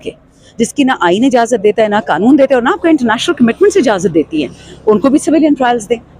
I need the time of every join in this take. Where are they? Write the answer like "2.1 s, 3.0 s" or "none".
none